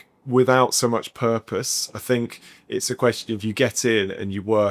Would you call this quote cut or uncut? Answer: uncut